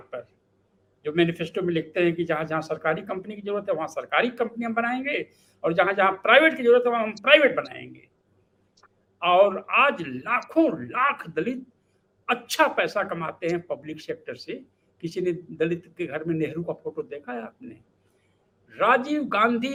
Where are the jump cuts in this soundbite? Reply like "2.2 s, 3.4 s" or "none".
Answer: none